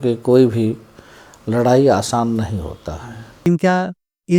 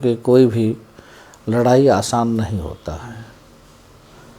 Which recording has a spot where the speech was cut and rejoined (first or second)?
first